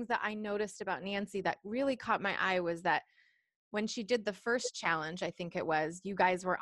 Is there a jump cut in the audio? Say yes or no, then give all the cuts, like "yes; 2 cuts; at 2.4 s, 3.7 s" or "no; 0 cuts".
no; 0 cuts